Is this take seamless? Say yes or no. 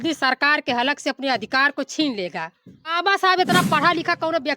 no